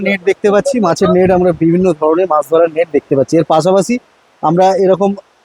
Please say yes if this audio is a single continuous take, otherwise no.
yes